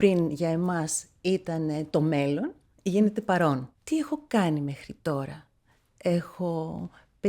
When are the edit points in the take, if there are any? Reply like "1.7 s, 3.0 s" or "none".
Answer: 3.7 s